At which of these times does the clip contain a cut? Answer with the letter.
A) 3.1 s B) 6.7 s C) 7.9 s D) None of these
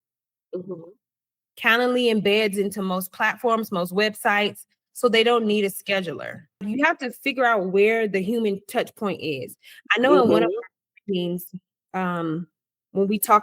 B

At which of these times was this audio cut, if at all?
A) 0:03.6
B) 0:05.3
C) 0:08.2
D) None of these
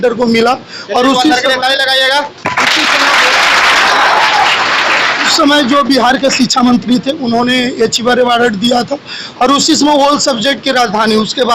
B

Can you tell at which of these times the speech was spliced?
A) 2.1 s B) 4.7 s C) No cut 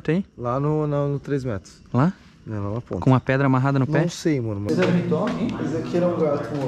B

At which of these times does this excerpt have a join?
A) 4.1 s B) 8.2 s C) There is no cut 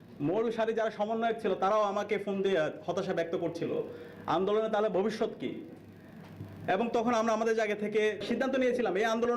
B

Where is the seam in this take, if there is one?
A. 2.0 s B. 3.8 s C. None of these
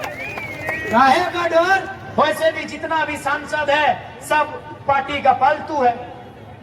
A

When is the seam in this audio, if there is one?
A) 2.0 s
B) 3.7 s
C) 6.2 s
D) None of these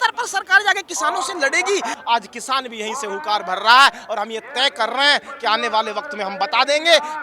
A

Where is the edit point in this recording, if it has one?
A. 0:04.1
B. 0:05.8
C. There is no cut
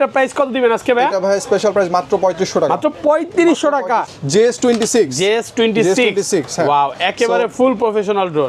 A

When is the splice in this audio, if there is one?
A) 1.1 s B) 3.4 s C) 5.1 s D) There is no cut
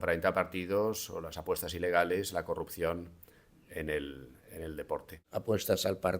C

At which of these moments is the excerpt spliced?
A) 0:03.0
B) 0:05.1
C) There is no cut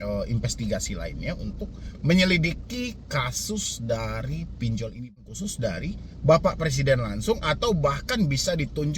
B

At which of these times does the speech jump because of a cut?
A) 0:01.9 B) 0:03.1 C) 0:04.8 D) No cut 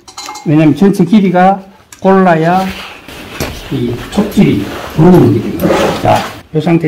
D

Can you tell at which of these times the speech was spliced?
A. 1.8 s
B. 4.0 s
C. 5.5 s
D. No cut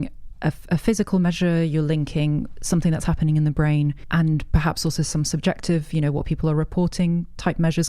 B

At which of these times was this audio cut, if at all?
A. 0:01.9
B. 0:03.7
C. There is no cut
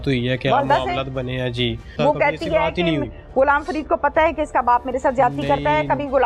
A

